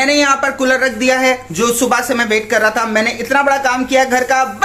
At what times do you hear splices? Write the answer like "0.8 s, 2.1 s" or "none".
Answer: none